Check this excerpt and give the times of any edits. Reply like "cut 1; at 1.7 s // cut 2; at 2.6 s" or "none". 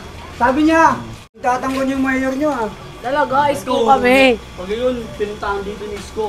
cut 1; at 1.4 s